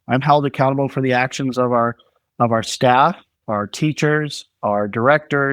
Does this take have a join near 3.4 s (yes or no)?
yes